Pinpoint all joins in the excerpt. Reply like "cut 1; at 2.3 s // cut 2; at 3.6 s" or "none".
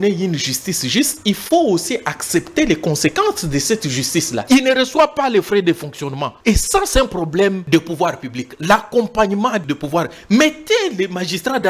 cut 1; at 4.4 s // cut 2; at 6.3 s // cut 3; at 7.6 s // cut 4; at 9.6 s